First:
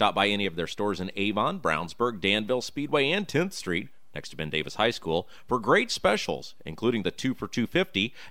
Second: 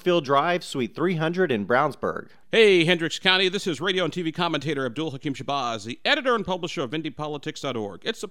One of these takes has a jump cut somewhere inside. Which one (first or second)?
second